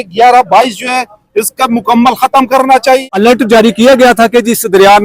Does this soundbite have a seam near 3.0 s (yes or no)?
yes